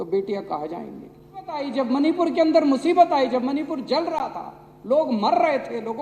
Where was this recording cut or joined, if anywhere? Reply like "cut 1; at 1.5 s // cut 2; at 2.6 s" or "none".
cut 1; at 1.7 s